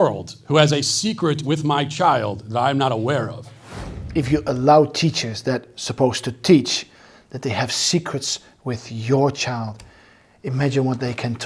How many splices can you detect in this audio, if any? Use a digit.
1